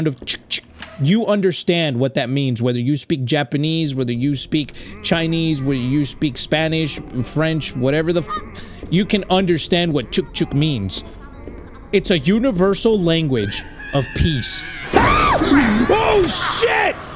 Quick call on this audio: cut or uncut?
uncut